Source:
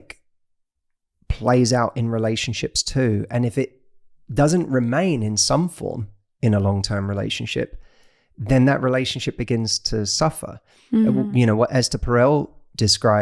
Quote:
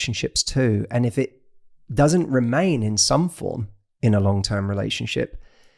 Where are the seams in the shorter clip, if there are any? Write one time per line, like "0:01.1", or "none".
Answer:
none